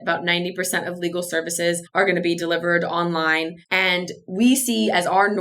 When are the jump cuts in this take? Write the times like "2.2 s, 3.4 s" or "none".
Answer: 1.8 s, 3.6 s